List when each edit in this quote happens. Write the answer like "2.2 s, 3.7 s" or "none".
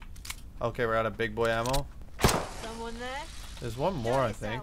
2.0 s